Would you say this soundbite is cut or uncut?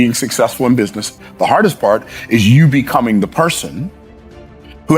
cut